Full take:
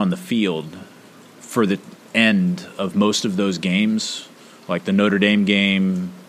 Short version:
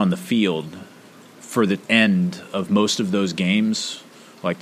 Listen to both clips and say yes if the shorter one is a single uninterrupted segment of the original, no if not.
no